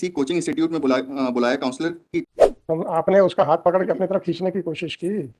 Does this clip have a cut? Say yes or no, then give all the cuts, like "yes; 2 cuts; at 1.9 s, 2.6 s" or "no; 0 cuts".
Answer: yes; 1 cut; at 2.2 s